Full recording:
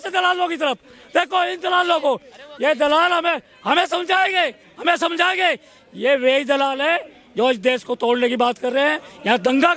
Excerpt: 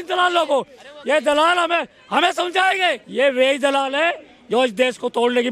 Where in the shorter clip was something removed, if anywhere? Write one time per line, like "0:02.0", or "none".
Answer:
0:03.0